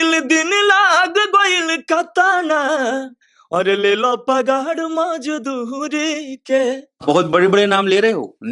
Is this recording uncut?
no; 1 cut; at 7.0 s

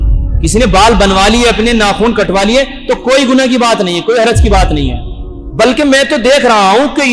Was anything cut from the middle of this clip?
no; 0 cuts

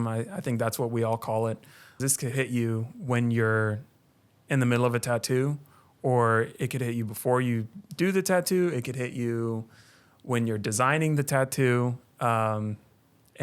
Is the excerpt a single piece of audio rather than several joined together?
no; 1 cut; at 2.0 s

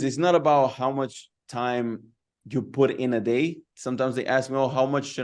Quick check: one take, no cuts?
yes; 0 cuts

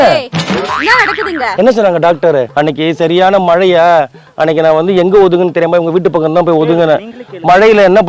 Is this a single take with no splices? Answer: no; 1 cut; at 2.5 s

